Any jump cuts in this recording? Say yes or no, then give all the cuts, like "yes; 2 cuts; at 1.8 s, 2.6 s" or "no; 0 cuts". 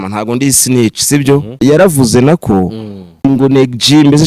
yes; 2 cuts; at 1.6 s, 3.2 s